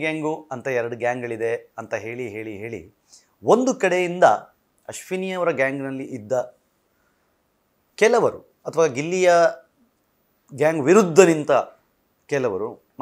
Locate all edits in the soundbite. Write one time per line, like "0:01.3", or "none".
none